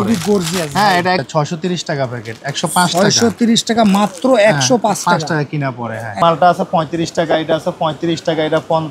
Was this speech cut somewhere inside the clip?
yes; 2 cuts; at 1.2 s, 6.2 s

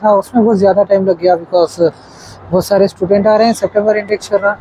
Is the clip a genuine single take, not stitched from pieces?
yes; 0 cuts

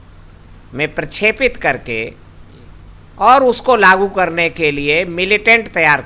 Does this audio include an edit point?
no; 0 cuts

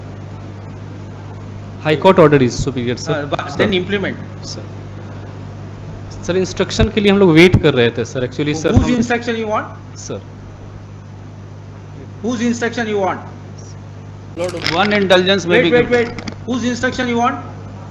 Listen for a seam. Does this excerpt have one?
yes; 1 cut; at 14.4 s

